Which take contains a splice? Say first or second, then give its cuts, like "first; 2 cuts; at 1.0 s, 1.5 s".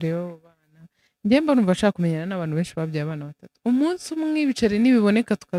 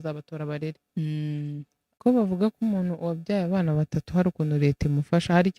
second; 1 cut; at 2.0 s